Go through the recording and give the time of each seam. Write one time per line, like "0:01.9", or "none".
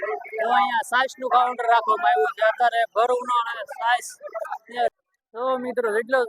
0:04.9